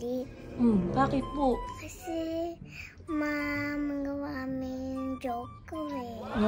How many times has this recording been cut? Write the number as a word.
one